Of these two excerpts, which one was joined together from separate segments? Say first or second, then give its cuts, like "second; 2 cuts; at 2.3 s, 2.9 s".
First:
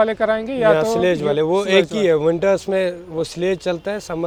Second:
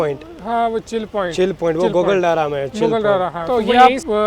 second; 1 cut; at 3.4 s